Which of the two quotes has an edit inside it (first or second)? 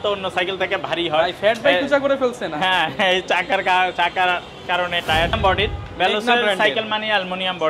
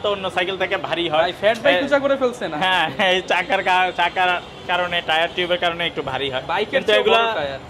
first